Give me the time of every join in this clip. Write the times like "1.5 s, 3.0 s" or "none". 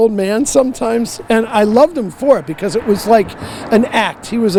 none

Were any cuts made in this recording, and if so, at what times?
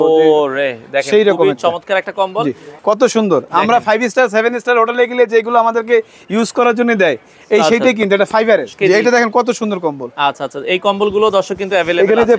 2.8 s, 8.7 s

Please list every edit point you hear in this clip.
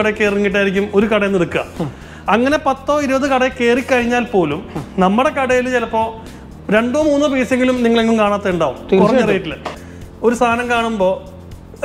9.7 s

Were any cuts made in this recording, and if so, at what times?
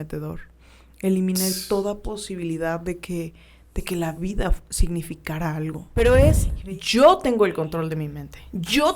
5.8 s

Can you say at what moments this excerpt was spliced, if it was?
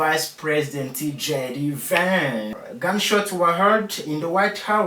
2.6 s

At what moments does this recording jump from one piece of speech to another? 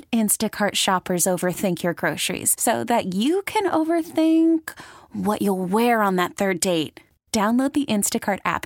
none

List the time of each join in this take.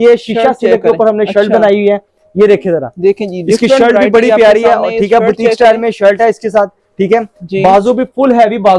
none

